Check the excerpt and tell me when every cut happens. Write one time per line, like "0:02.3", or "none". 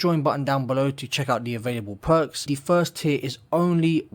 0:02.4